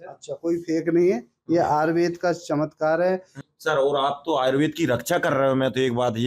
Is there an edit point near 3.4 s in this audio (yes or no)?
yes